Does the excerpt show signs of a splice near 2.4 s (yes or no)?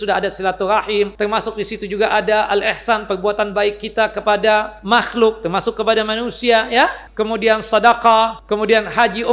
no